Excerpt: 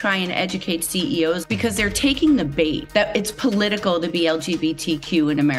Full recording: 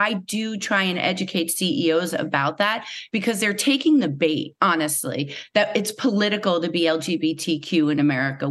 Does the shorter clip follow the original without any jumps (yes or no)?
no